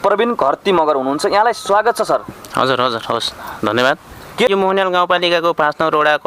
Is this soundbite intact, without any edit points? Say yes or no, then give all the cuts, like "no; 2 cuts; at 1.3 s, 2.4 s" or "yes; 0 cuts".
no; 1 cut; at 4.5 s